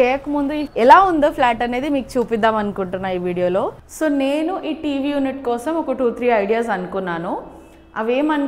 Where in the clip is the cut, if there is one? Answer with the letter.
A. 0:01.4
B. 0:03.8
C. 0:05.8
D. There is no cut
B